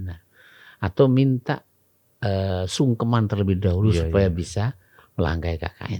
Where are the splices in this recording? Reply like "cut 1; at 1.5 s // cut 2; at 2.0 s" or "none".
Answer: none